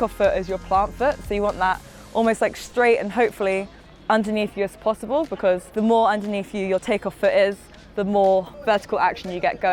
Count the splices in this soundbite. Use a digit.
2